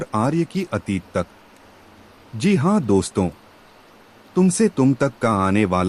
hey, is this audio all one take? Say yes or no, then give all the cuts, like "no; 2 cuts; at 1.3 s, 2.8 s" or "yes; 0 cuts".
yes; 0 cuts